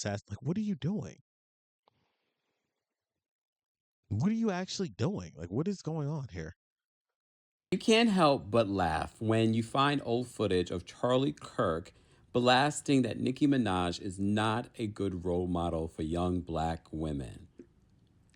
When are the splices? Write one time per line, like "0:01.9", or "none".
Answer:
0:07.7